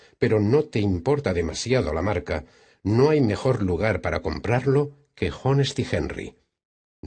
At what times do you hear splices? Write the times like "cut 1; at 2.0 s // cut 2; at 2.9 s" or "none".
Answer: cut 1; at 5.9 s